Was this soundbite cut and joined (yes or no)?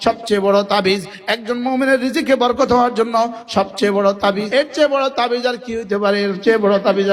yes